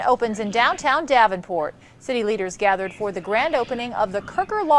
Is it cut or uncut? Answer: cut